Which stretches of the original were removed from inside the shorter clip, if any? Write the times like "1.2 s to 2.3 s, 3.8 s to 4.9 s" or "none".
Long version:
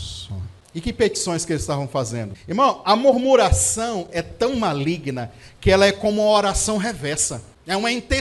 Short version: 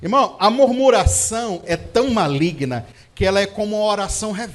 none